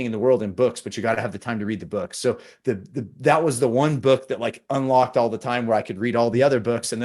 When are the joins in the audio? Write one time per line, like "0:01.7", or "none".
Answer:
none